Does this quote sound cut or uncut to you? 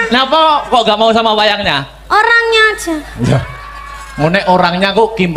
uncut